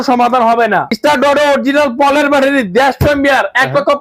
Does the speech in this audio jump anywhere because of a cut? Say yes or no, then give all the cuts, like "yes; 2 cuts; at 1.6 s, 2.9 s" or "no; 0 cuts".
yes; 1 cut; at 0.9 s